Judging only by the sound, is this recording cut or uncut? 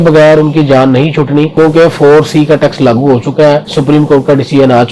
uncut